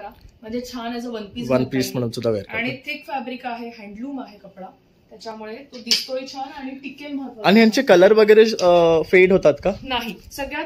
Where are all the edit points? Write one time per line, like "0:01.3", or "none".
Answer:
none